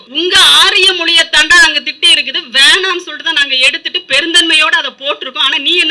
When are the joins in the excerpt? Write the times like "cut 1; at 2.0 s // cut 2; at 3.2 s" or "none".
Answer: none